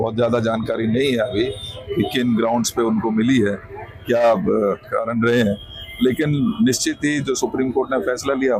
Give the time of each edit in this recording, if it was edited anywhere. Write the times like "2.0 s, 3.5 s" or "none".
none